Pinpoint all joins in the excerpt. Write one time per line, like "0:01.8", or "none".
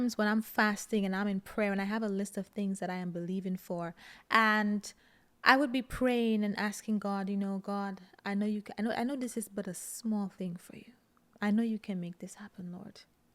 none